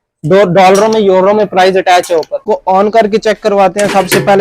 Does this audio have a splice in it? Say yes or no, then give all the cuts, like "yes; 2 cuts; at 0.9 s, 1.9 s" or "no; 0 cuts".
yes; 1 cut; at 2.4 s